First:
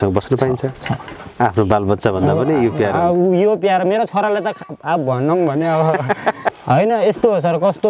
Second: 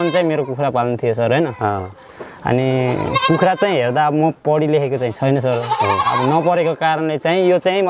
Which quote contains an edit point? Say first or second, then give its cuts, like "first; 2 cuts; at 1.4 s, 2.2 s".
first; 2 cuts; at 1.0 s, 6.4 s